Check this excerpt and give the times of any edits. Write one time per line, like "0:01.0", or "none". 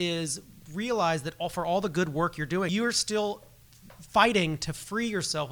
0:02.7

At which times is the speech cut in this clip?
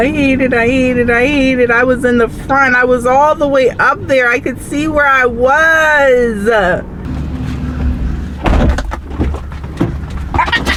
none

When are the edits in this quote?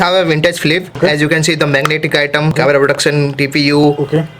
0:00.9
0:02.5

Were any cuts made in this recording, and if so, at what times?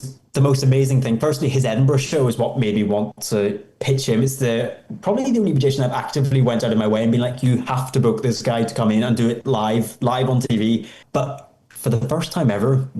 0:11.0

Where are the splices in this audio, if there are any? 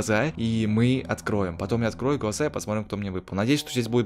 none

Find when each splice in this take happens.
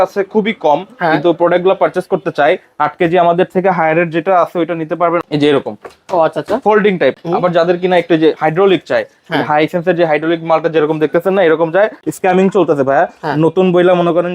0:05.2
0:07.2
0:12.0

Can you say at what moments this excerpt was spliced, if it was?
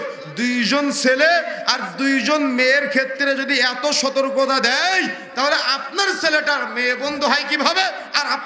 none

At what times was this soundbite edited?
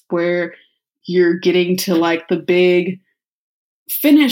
0:00.9

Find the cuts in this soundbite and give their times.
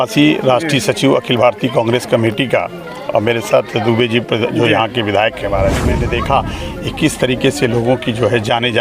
0:06.0

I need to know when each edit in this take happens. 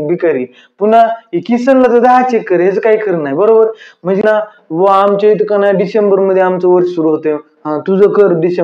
0:04.2

